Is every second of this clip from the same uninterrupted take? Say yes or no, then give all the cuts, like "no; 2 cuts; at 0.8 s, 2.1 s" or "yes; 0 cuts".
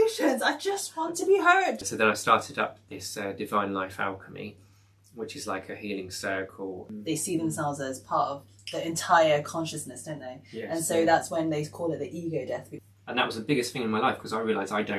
no; 3 cuts; at 1.9 s, 6.9 s, 12.7 s